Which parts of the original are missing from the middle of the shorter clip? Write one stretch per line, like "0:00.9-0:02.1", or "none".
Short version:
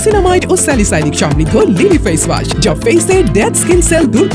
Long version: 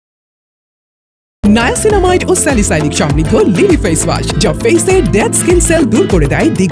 none